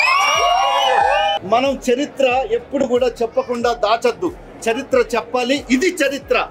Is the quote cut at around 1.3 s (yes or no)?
yes